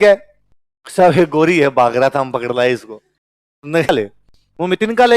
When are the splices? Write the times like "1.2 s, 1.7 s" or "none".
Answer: 3.9 s